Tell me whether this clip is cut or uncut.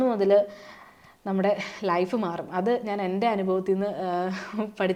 uncut